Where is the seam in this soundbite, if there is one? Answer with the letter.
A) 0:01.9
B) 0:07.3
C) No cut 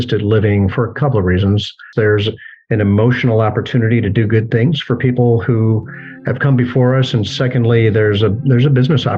A